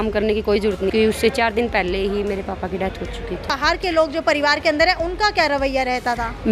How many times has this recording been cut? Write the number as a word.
two